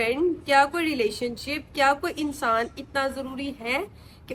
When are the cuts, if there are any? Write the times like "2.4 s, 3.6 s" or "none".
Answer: none